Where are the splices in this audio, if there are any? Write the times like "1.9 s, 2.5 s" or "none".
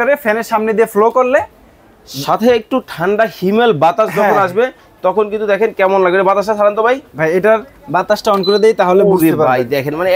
none